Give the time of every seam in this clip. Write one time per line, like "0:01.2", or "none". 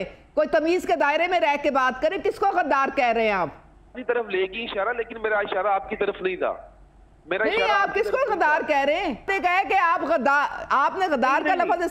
0:03.9
0:09.3

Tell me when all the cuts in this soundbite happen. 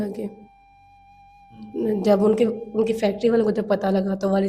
none

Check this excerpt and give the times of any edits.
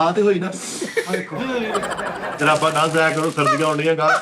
0:02.4

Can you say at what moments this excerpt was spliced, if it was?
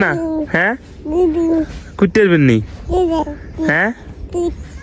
none

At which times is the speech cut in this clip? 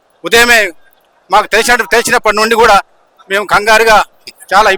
none

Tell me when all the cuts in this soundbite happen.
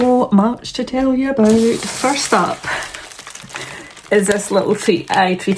none

